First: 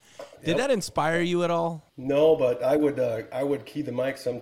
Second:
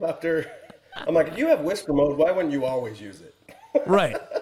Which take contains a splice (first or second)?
first